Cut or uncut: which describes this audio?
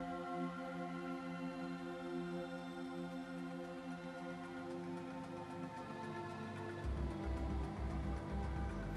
uncut